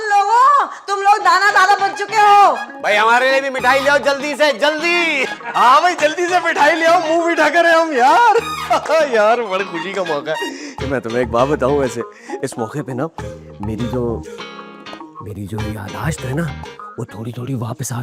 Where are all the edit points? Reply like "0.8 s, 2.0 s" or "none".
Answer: none